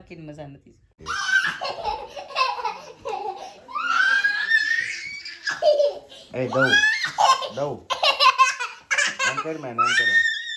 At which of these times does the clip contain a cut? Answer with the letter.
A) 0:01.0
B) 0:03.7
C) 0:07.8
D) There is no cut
A